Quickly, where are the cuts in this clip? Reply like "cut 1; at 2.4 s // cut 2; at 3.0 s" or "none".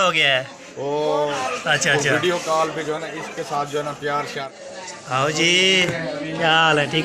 cut 1; at 1.4 s // cut 2; at 4.5 s